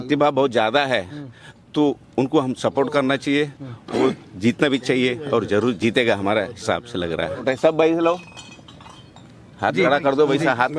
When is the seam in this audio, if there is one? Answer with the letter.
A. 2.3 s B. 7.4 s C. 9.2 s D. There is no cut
B